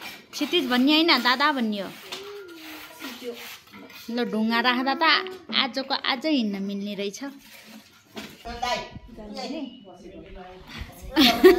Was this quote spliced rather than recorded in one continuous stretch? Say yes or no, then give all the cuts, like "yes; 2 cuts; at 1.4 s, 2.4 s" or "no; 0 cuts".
yes; 1 cut; at 8.4 s